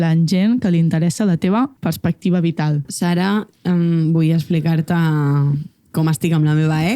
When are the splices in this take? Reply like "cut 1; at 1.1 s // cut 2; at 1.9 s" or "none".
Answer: cut 1; at 1.8 s // cut 2; at 2.9 s